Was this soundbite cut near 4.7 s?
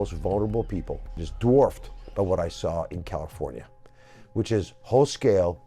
no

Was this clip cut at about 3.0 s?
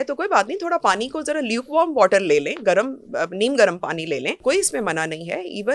no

